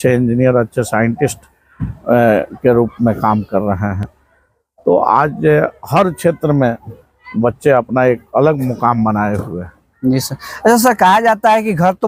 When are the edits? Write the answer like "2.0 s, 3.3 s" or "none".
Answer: none